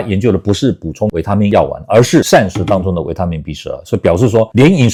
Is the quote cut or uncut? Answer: uncut